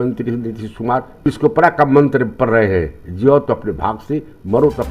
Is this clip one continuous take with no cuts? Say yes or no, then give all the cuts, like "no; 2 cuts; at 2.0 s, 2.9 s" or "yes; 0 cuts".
no; 1 cut; at 1.2 s